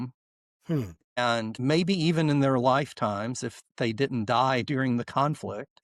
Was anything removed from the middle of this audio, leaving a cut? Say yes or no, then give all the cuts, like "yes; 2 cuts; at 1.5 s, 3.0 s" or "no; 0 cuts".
no; 0 cuts